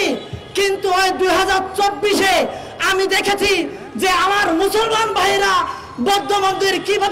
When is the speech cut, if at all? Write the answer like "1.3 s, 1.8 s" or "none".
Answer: none